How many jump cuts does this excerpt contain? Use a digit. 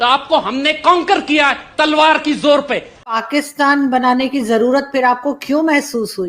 1